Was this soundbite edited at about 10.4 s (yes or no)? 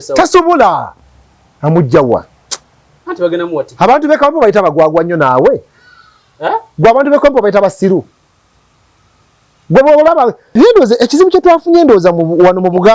yes